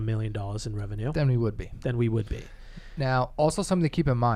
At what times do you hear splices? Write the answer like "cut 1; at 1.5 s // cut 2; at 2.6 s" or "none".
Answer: none